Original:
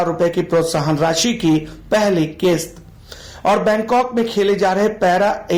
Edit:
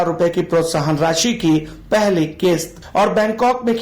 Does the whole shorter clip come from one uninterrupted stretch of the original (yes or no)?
no